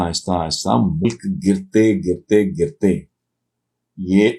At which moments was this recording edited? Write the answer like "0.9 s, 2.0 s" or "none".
1.1 s